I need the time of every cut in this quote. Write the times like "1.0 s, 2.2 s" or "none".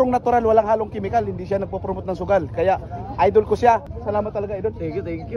3.9 s

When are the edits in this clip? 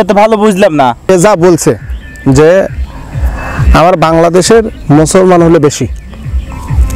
1.1 s

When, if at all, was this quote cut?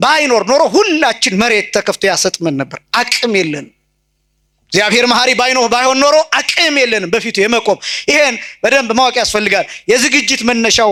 none

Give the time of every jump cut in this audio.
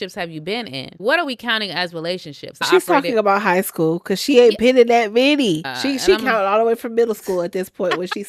1.0 s, 2.7 s, 5.7 s

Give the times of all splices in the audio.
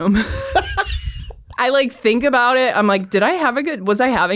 1.4 s

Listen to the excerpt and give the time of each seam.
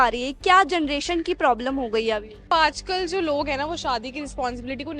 2.5 s

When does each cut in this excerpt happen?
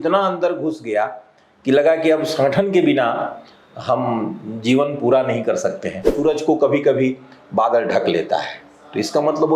6.1 s

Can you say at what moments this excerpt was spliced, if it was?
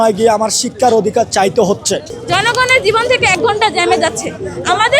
2.1 s

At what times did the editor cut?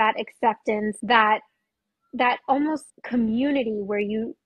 1.0 s, 2.9 s

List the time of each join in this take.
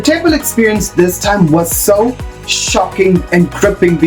none

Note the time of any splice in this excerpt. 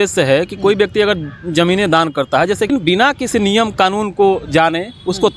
2.7 s

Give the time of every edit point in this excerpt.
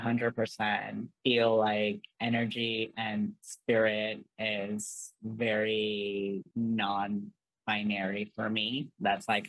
1.0 s, 2.1 s, 6.5 s

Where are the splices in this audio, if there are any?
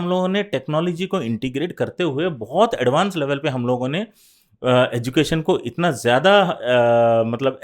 none

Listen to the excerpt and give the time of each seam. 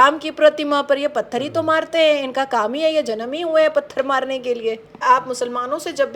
5.0 s

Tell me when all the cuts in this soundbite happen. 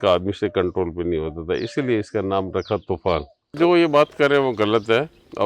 3.5 s

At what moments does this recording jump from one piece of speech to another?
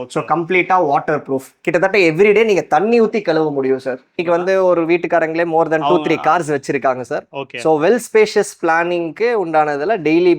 4.2 s

